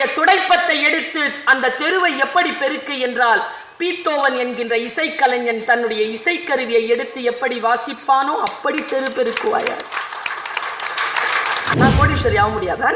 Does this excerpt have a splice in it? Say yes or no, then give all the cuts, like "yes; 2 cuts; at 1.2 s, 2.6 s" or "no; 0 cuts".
yes; 1 cut; at 11.7 s